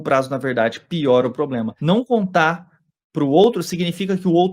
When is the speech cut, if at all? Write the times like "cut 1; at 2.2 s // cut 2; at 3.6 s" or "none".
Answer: cut 1; at 1.7 s